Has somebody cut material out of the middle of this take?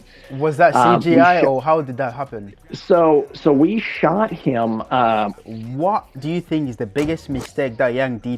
yes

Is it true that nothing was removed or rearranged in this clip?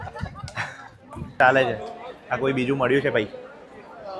no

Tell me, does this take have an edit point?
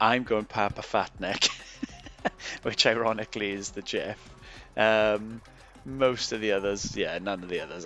no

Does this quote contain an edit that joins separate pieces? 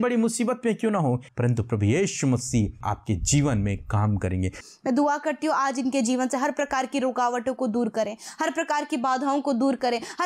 yes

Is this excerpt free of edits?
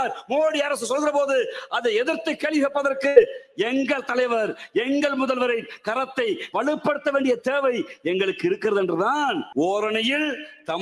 no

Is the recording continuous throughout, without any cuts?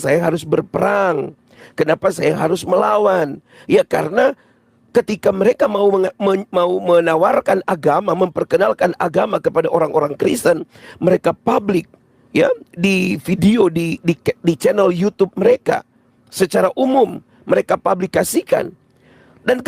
no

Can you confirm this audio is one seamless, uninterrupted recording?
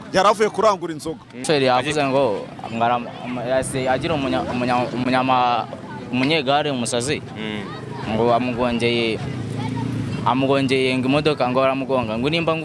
no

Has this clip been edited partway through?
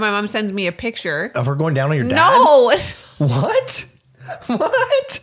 yes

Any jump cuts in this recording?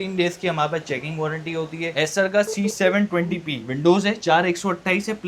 yes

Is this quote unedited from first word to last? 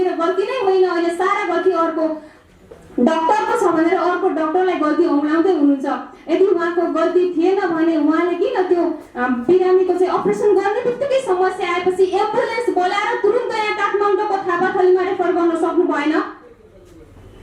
yes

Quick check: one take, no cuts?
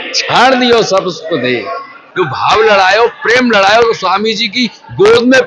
no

